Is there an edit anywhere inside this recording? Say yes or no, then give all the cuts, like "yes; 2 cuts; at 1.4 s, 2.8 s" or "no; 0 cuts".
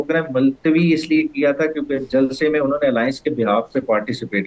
no; 0 cuts